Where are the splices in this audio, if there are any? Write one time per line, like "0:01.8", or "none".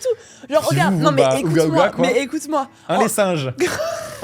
none